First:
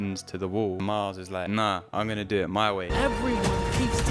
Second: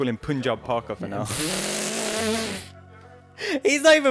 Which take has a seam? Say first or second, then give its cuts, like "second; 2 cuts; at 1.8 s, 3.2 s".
first; 2 cuts; at 1.2 s, 2.9 s